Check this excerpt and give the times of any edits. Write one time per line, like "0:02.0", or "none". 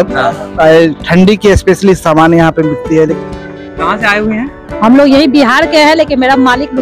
0:03.2